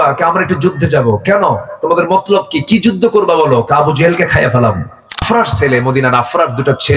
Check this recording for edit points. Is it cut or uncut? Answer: cut